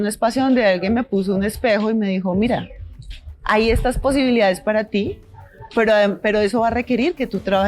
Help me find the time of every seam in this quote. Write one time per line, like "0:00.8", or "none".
none